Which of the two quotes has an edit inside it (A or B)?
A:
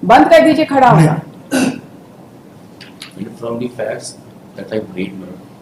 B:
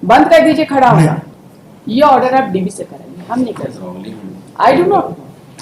B